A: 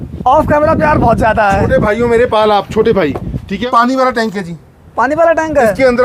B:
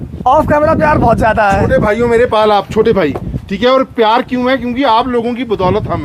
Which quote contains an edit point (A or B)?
A